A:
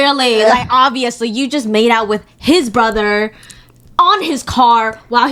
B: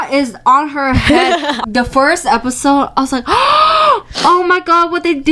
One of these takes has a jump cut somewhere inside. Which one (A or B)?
B